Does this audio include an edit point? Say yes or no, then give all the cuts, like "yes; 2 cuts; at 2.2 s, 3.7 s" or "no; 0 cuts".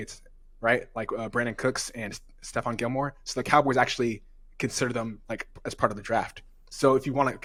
no; 0 cuts